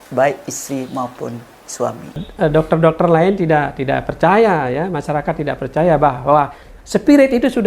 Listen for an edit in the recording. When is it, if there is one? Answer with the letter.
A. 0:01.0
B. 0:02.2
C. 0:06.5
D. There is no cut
B